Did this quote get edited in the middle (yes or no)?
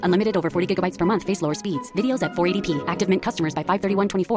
no